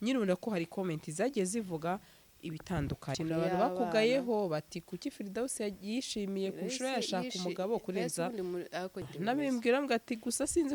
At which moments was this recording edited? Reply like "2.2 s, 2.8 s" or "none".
3.2 s, 9.0 s